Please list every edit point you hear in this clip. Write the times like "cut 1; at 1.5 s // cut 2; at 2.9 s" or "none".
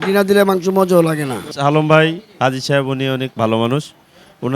cut 1; at 1.5 s